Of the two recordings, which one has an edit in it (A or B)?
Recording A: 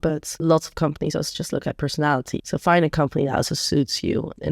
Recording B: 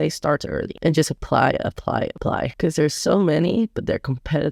A